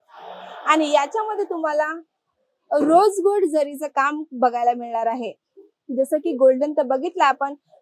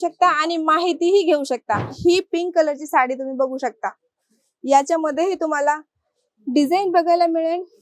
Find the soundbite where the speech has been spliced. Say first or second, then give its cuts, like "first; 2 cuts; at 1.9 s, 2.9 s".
second; 1 cut; at 2.0 s